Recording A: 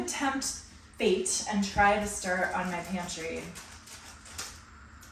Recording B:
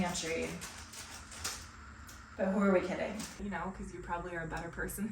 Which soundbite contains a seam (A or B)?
B